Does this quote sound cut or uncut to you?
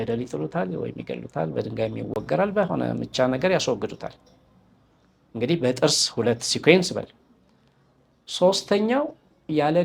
uncut